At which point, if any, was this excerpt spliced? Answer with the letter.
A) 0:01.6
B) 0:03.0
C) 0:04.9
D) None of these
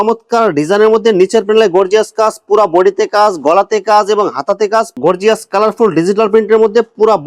C